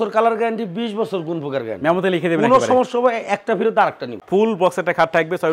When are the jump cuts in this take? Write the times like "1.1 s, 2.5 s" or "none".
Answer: 4.2 s